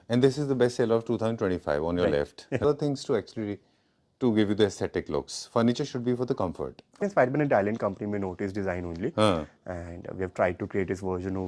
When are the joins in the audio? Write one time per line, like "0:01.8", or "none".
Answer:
0:02.6
0:07.0